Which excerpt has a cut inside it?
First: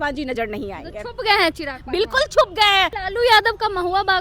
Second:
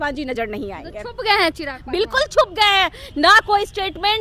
first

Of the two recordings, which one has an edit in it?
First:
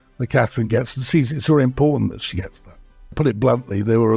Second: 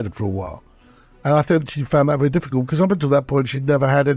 first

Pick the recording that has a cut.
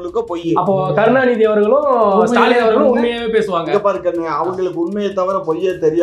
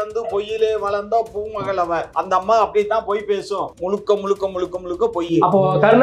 second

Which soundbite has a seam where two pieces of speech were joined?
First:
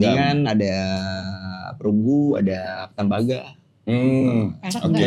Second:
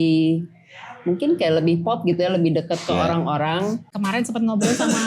second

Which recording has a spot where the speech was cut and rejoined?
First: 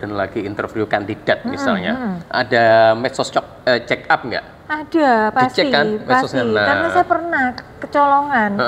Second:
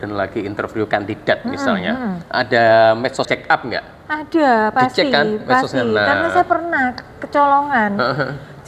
second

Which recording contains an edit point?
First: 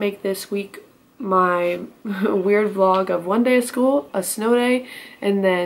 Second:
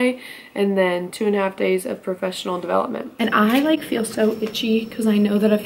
second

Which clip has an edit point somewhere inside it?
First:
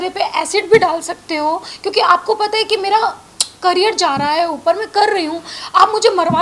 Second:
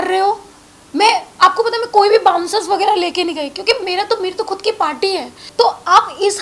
second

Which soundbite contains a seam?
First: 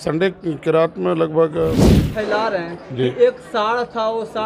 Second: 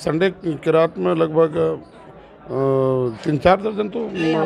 first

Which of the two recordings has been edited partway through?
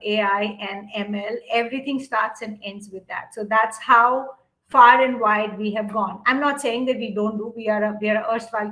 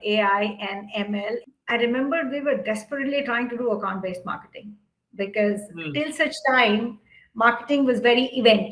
second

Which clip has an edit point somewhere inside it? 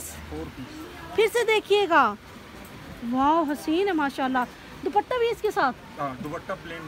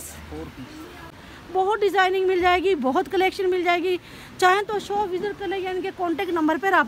second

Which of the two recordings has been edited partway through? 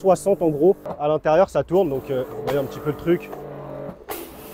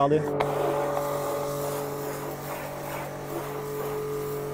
first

